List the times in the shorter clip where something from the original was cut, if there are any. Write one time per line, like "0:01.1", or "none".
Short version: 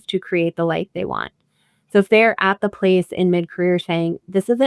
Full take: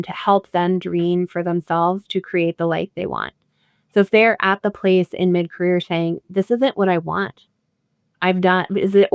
none